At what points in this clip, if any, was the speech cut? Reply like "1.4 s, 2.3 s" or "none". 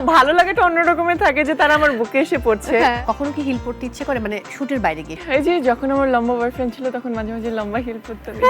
3.0 s, 5.2 s